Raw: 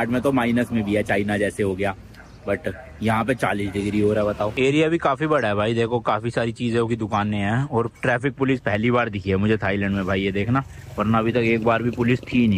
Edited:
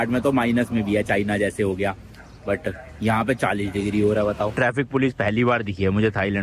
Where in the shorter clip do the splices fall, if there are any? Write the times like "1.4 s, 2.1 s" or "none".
4.5 s